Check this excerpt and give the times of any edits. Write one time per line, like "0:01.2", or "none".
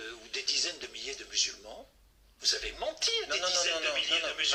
none